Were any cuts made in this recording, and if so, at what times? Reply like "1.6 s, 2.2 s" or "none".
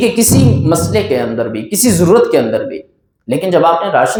none